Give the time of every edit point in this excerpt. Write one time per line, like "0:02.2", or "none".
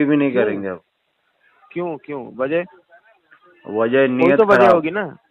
none